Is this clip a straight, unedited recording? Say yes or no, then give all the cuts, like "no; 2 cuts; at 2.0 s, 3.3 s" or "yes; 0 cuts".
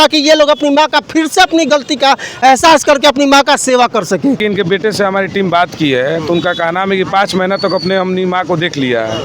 no; 1 cut; at 4.4 s